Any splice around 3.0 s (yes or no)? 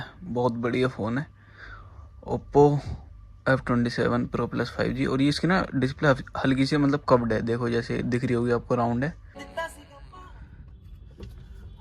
no